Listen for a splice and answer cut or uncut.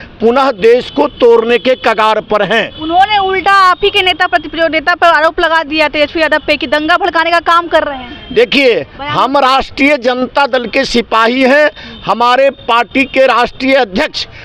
uncut